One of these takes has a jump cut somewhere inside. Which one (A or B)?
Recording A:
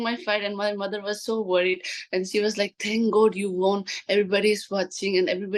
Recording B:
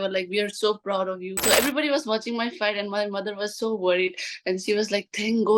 B